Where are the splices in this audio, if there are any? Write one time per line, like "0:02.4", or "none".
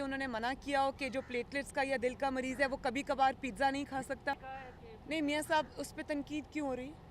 0:04.5